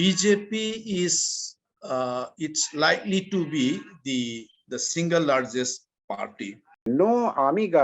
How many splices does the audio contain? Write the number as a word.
one